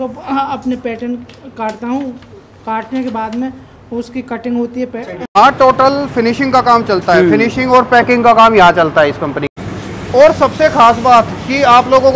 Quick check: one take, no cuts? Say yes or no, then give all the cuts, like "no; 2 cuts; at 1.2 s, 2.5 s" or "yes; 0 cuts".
no; 2 cuts; at 5.3 s, 9.4 s